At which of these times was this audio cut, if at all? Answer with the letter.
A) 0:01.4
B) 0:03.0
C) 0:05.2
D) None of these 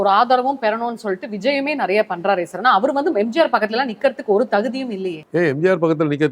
C